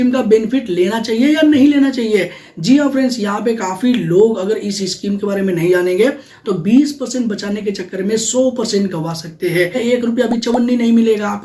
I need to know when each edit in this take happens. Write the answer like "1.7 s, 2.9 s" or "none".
9.8 s